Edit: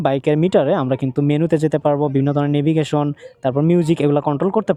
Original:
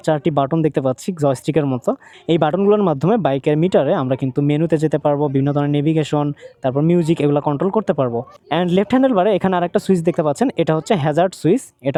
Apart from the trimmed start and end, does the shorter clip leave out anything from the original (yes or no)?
no